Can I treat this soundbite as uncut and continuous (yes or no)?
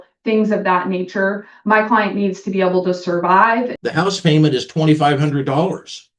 no